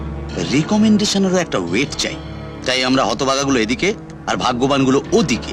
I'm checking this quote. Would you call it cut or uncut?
uncut